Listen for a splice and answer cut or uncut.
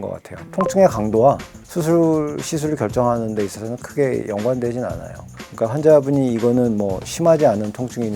cut